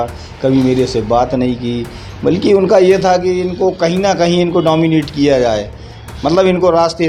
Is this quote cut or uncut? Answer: uncut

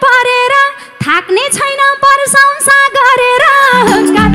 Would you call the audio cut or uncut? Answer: uncut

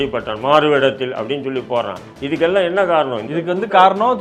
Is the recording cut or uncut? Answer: uncut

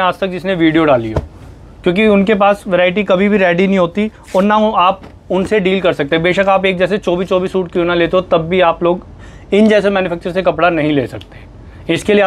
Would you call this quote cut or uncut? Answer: uncut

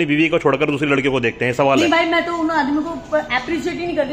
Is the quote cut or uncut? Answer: uncut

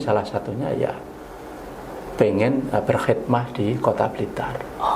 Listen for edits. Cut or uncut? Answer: uncut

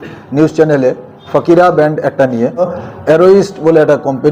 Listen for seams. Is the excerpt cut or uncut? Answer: cut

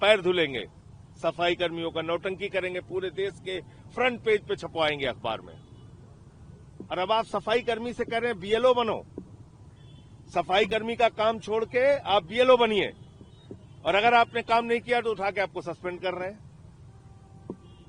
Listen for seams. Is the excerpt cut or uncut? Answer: uncut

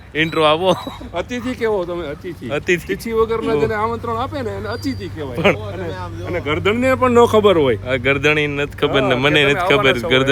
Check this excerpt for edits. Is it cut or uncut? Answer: uncut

